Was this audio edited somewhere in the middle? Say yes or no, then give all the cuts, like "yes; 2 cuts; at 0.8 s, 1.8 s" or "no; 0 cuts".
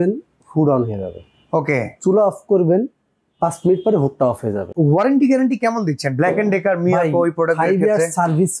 yes; 1 cut; at 4.7 s